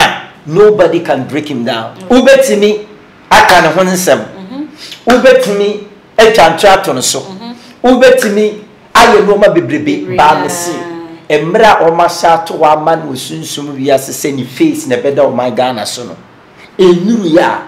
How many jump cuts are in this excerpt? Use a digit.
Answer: 1